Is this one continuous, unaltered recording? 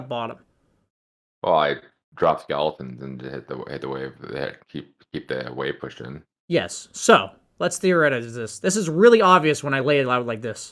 yes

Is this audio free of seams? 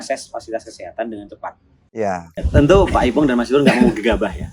no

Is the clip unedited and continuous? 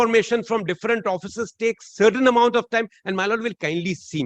yes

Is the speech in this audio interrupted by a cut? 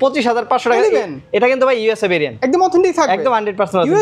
no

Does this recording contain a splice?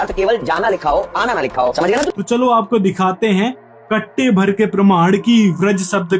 no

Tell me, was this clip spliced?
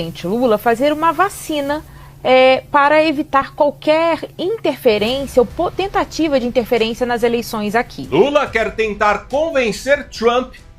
yes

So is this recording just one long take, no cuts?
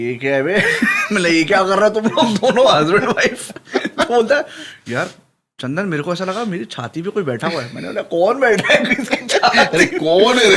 yes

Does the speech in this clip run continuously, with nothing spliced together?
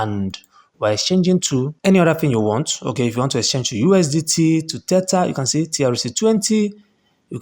no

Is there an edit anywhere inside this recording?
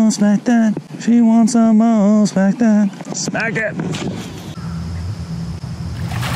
yes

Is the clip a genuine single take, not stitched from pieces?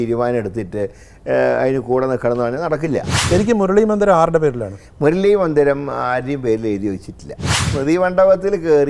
no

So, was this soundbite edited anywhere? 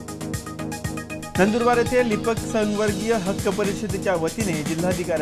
yes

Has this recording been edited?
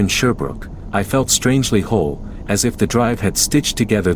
no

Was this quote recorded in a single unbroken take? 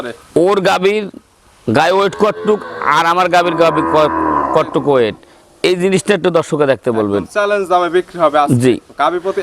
yes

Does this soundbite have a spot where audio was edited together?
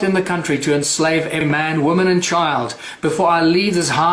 yes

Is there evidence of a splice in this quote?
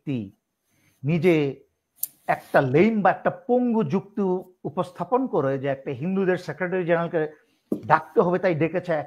no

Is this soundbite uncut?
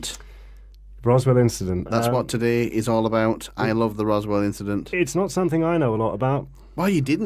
yes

